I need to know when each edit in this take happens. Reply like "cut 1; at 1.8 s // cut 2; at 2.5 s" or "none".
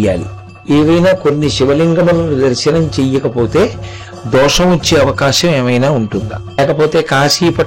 cut 1; at 6.6 s